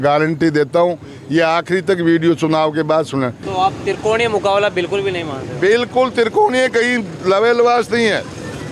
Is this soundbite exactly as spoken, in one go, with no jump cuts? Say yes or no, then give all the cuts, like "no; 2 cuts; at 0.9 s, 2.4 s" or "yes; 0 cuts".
yes; 0 cuts